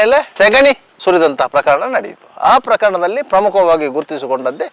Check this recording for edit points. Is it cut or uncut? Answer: uncut